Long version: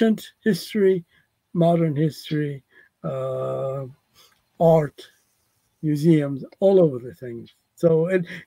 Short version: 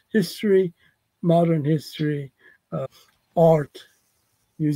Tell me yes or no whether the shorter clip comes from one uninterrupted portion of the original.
no